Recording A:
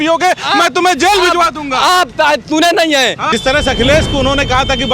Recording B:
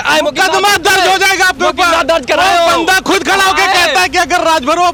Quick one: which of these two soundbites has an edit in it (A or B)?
A